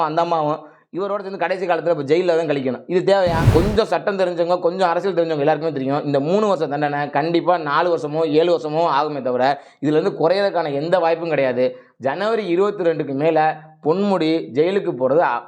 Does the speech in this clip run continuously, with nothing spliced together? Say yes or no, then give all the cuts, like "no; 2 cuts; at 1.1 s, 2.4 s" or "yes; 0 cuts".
no; 1 cut; at 3.4 s